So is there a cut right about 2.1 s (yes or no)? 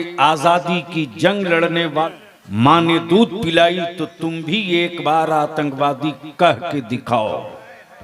yes